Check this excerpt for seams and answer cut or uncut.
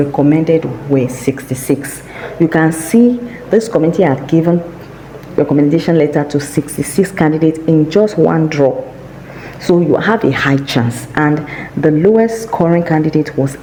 uncut